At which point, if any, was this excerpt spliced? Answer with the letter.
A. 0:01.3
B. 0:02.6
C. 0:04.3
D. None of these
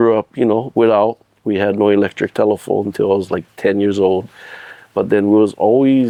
D